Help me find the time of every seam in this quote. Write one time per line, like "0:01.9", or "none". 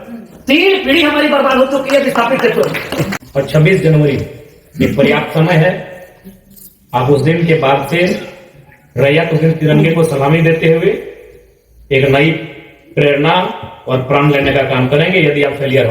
0:03.2